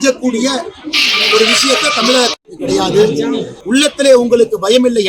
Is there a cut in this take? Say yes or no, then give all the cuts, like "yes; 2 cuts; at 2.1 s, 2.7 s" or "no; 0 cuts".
yes; 1 cut; at 3.5 s